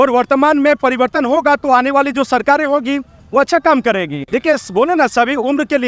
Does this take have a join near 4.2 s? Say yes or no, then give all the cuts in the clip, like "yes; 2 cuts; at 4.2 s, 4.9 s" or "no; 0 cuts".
yes; 1 cut; at 4.2 s